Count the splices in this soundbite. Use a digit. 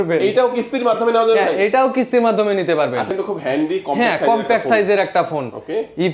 1